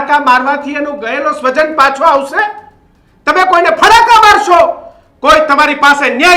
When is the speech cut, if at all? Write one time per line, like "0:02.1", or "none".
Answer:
none